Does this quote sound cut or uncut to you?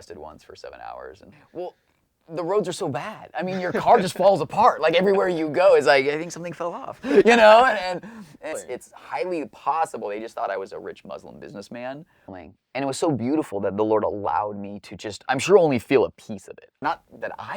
cut